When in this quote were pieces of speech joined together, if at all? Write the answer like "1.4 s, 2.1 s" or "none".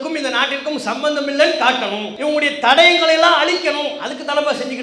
2.1 s